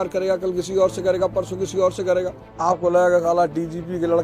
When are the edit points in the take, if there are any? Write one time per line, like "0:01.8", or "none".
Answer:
0:02.5